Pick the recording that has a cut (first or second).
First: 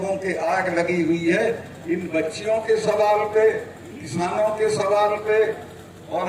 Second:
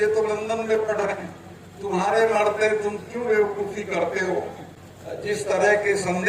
second